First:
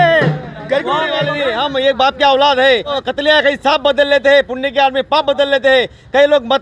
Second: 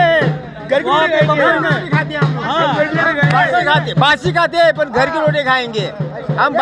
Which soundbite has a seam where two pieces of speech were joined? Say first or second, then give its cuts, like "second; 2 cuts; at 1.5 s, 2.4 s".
first; 2 cuts; at 1.3 s, 3.0 s